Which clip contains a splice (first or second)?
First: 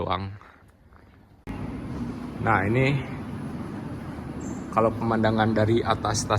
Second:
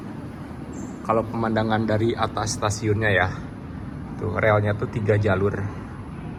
first